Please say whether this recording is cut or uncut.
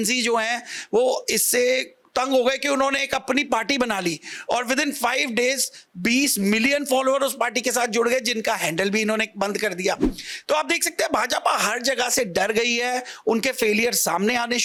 uncut